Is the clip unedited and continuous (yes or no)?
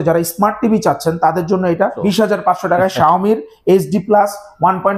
no